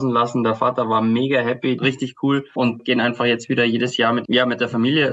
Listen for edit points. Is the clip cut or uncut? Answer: cut